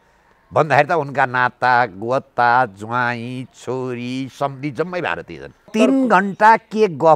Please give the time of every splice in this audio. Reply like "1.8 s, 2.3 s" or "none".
5.7 s